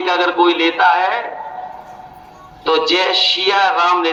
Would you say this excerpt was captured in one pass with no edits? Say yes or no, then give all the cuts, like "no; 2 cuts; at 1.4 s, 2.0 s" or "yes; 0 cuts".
yes; 0 cuts